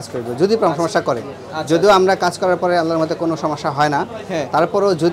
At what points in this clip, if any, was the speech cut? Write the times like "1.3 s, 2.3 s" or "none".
none